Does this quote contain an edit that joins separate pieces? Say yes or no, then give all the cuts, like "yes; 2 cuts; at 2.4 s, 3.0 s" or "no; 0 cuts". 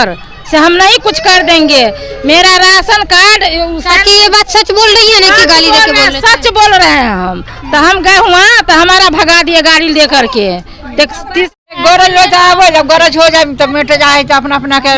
yes; 1 cut; at 11.7 s